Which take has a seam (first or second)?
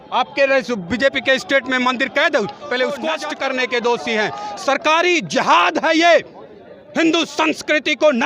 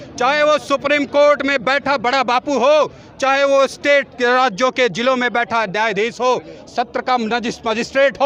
first